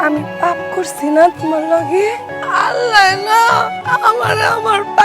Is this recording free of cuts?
no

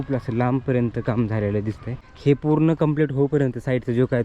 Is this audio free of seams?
no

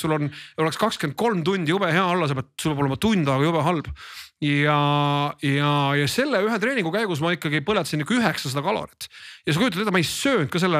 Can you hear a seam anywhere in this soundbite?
no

